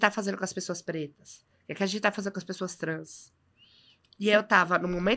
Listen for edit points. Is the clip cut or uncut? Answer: uncut